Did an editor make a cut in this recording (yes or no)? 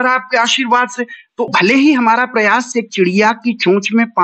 yes